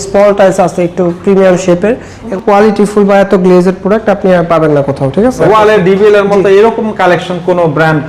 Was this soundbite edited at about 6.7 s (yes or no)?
no